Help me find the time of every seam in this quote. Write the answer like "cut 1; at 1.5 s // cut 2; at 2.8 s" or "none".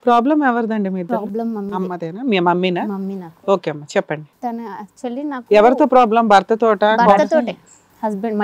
cut 1; at 7.3 s

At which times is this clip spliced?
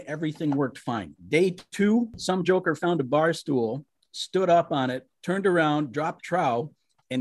cut 1; at 1.1 s // cut 2; at 2.2 s // cut 3; at 5.1 s

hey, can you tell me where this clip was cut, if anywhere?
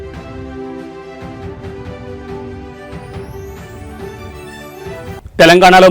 cut 1; at 3.5 s // cut 2; at 5.2 s

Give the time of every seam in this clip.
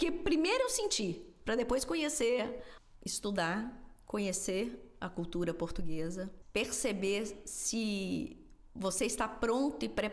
cut 1; at 2.7 s // cut 2; at 6.4 s

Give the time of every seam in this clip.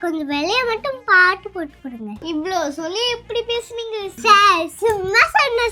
none

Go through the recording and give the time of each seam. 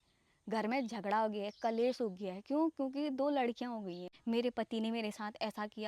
cut 1; at 4.1 s

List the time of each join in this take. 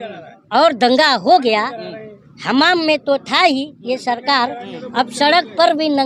none

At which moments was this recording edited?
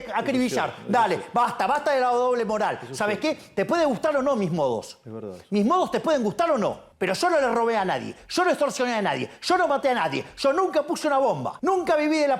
cut 1; at 6.9 s // cut 2; at 11.5 s

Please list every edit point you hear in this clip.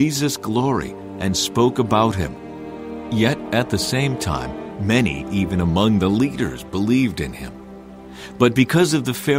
cut 1; at 1.0 s // cut 2; at 4.7 s // cut 3; at 8.0 s

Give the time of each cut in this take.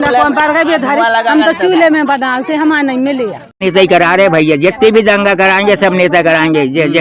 cut 1; at 3.6 s

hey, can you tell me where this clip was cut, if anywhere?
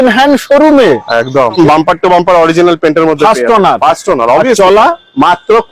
cut 1; at 1.6 s

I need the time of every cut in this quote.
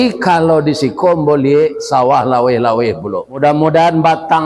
cut 1; at 3.4 s

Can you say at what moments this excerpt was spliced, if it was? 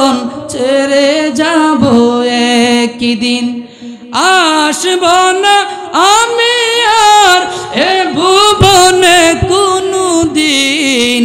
none

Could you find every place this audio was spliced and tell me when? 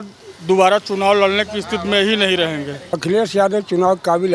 cut 1; at 2.9 s

